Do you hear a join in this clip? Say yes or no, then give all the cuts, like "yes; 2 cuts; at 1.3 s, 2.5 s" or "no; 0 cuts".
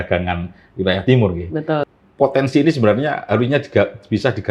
yes; 1 cut; at 1.8 s